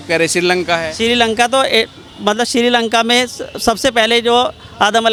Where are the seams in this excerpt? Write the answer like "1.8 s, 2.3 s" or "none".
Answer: none